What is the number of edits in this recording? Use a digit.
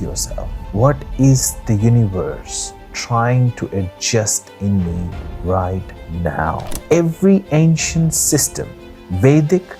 1